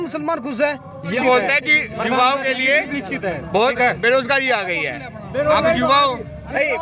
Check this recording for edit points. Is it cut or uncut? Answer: cut